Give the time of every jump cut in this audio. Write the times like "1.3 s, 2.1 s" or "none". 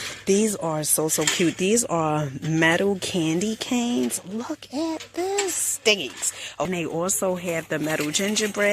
6.7 s